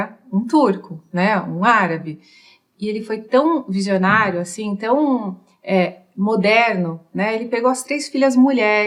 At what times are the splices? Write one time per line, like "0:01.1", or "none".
none